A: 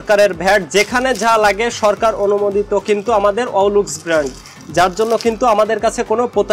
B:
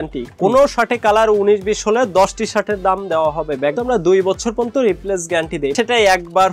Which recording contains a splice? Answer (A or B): B